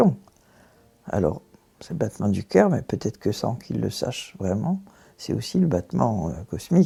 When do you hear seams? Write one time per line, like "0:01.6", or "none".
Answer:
none